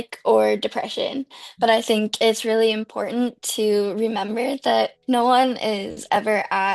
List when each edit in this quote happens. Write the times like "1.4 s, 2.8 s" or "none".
5.0 s